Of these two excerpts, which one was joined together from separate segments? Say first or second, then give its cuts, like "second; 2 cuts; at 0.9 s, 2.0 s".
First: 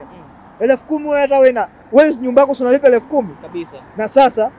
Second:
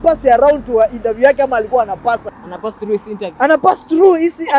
second; 1 cut; at 2.3 s